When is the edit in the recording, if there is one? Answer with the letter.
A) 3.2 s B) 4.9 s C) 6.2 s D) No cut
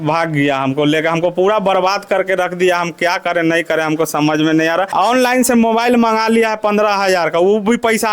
B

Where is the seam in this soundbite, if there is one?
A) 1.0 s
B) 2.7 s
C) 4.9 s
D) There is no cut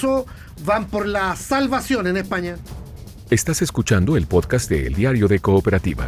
B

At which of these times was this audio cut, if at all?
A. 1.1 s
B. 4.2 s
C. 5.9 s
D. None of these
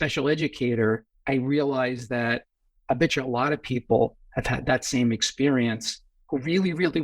A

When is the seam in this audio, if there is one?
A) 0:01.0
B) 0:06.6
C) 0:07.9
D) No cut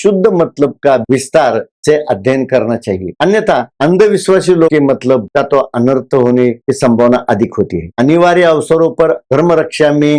A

